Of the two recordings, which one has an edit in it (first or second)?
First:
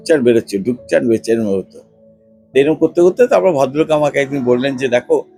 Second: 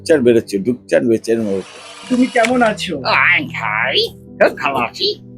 second